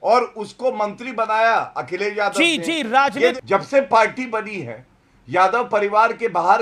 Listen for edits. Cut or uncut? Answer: cut